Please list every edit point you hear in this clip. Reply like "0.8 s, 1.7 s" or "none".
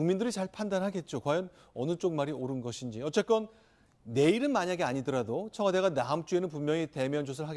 3.1 s